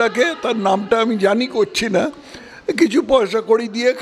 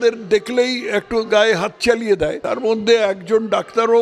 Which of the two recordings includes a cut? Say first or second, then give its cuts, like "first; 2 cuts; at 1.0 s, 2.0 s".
second; 1 cut; at 2.4 s